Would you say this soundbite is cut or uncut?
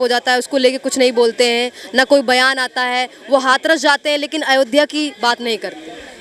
uncut